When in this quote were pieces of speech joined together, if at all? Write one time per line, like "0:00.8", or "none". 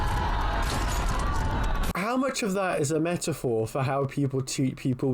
0:01.9